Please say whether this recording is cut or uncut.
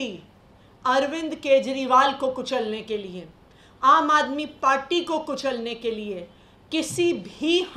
uncut